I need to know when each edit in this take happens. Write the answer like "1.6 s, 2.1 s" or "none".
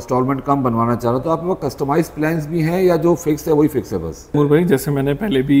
4.3 s